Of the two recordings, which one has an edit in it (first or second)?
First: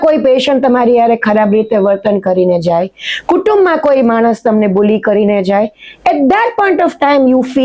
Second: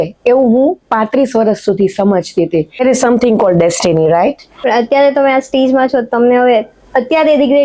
second